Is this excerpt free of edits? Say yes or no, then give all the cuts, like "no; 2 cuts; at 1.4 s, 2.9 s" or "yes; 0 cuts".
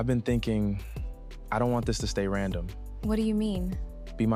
yes; 0 cuts